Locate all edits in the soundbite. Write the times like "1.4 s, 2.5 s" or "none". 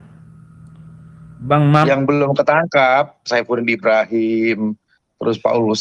1.9 s